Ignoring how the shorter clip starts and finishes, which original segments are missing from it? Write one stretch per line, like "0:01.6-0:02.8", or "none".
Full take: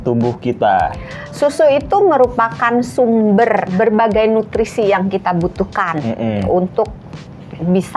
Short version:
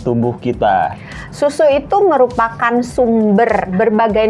none

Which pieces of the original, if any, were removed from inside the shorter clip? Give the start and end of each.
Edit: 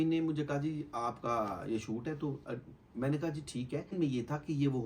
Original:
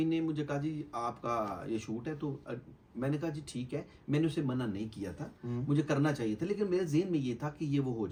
0:03.9-0:07.1

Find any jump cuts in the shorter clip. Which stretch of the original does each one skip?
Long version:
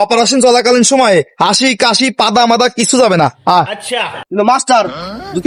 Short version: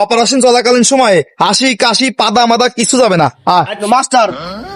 0:03.8-0:04.3

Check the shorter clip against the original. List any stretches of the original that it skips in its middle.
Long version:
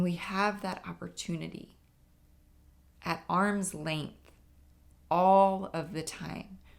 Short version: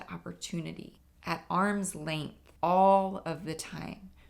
0:01.8-0:02.8
0:04.2-0:04.9

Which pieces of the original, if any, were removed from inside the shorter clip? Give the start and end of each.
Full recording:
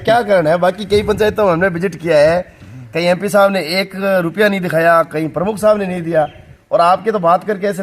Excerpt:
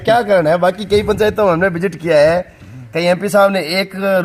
none

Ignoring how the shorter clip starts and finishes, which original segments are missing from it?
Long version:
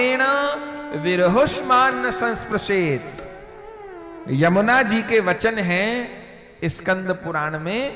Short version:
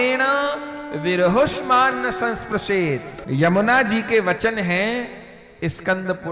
0:03.1-0:04.1

